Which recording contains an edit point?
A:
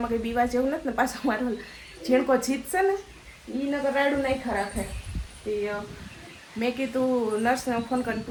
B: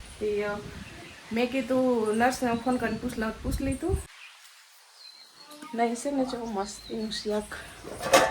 B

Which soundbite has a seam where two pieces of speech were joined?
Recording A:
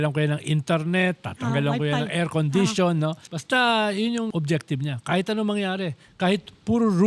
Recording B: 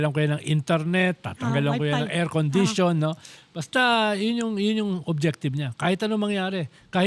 A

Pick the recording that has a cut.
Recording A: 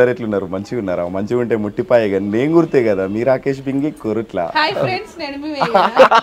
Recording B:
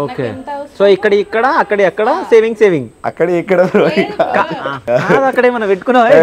B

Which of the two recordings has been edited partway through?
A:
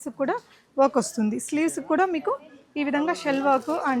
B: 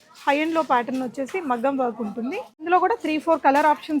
B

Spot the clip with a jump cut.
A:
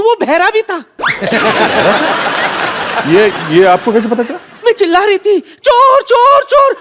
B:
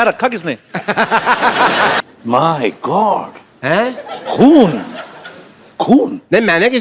B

